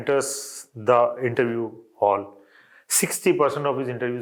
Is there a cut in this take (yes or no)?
no